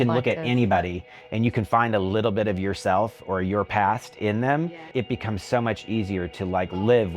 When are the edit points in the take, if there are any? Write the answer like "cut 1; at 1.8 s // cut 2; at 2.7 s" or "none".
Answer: cut 1; at 4.8 s